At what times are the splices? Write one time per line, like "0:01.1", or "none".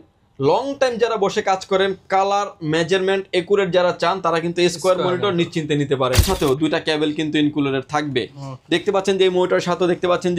0:06.2